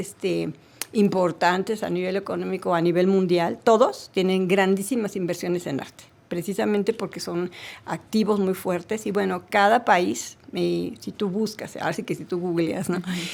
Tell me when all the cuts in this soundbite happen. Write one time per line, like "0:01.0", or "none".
none

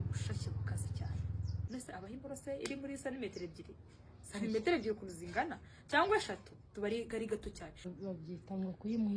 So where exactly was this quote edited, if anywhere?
0:01.6
0:07.9

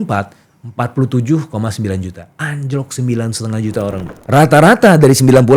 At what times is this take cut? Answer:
0:04.1

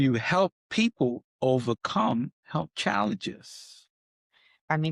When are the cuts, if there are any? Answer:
none

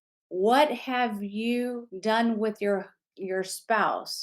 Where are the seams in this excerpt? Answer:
0:01.9

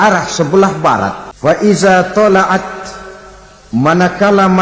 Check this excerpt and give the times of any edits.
0:01.2

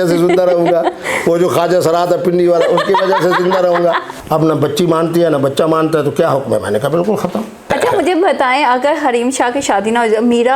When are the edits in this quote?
0:04.1
0:07.7

